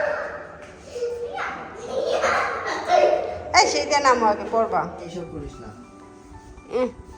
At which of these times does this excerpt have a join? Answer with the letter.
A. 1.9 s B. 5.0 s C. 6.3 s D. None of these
B